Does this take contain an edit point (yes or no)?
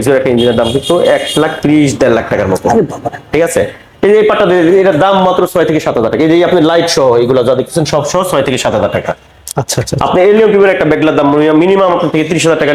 no